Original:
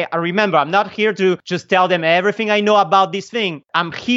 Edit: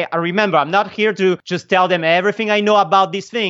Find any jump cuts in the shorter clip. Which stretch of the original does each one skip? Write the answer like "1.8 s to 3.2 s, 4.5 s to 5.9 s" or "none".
none